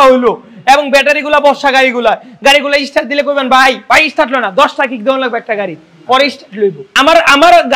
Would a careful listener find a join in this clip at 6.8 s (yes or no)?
yes